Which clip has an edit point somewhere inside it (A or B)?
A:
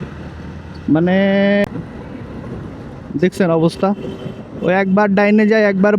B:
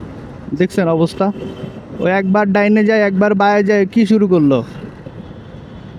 A